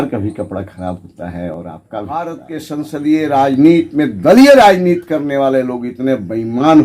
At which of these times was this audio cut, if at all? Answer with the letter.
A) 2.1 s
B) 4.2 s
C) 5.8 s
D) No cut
A